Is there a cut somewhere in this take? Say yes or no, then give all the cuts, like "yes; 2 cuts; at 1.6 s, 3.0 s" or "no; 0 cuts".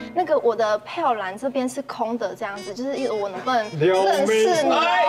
no; 0 cuts